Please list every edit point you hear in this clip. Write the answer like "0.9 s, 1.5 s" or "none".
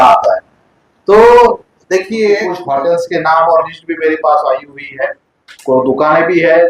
2.5 s